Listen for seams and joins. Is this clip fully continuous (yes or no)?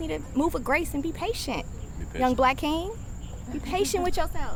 yes